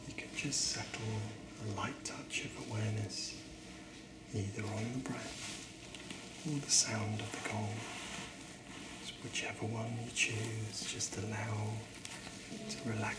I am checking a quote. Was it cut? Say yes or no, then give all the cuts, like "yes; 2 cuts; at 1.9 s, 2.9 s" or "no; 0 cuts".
no; 0 cuts